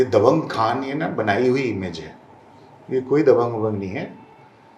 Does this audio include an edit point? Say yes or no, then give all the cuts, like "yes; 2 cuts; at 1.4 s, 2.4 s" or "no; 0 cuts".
no; 0 cuts